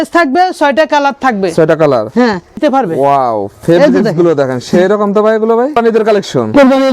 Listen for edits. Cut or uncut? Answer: cut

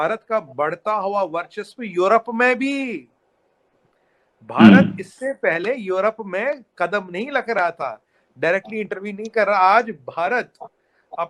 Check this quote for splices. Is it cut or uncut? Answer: uncut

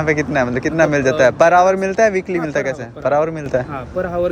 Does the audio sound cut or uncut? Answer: uncut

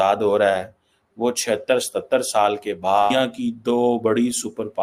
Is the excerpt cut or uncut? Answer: cut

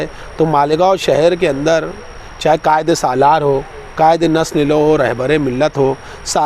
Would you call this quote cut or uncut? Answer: uncut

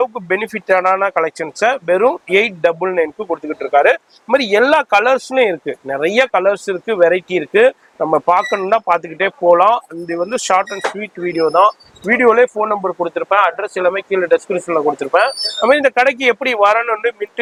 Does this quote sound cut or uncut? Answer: uncut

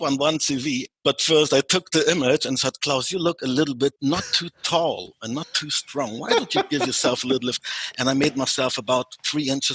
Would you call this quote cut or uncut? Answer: cut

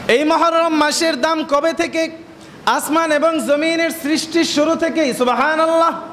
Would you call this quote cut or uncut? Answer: uncut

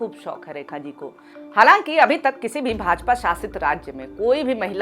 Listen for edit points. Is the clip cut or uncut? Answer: cut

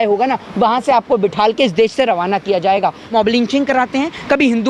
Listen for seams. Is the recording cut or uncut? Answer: cut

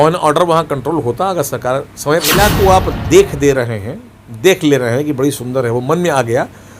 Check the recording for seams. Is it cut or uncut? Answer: cut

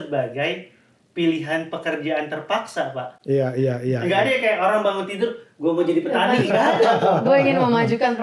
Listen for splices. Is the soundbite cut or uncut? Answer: uncut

